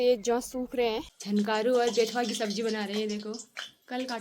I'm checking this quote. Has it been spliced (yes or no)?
yes